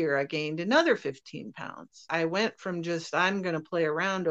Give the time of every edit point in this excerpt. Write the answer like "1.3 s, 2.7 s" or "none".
2.1 s